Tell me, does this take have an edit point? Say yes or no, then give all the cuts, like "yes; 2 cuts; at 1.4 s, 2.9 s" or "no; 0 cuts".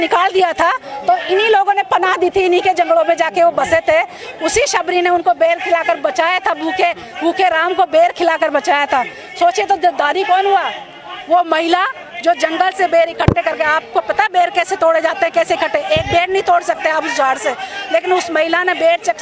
no; 0 cuts